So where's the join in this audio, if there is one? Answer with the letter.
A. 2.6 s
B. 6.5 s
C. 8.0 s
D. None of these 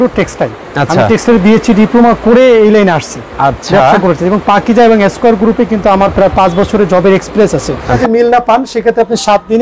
C